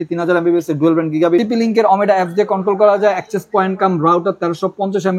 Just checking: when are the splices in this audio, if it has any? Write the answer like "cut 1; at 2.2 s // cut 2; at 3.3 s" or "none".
cut 1; at 1.4 s

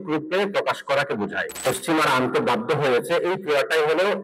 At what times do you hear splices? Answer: cut 1; at 1.5 s

